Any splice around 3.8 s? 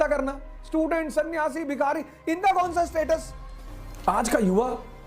yes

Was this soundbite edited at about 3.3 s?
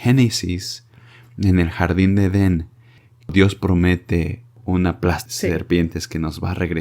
yes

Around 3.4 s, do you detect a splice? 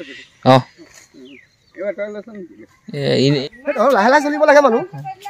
yes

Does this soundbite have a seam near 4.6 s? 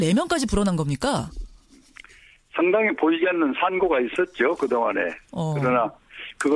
no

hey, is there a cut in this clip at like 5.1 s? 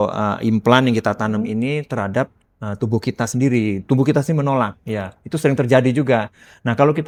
no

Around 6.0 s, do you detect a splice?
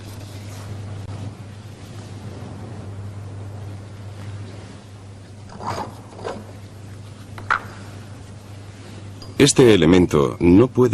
yes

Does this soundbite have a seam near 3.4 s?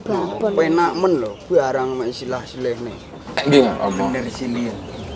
yes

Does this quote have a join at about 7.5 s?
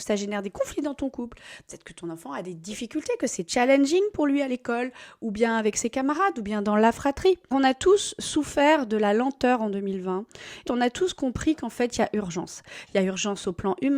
yes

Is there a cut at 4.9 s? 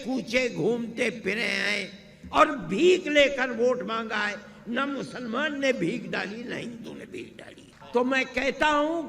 no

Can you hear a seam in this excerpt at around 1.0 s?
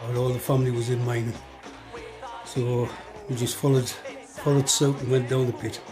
no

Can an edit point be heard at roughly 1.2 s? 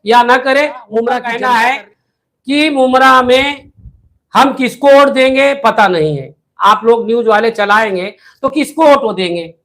yes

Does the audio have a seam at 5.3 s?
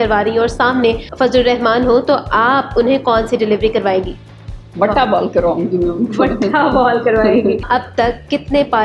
no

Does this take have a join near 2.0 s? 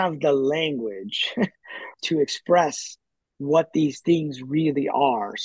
yes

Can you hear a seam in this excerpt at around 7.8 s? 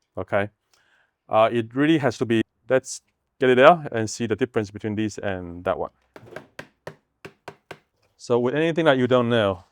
yes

